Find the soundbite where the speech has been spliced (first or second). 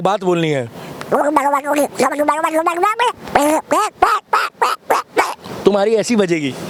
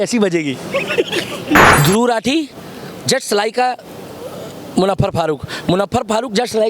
second